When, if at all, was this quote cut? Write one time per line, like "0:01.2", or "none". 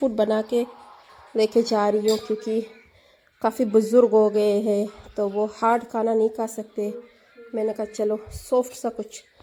none